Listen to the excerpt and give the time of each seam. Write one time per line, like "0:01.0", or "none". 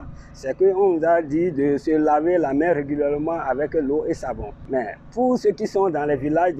0:04.5